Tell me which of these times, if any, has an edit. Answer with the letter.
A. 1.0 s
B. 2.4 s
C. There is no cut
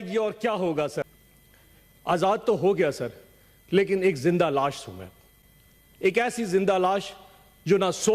A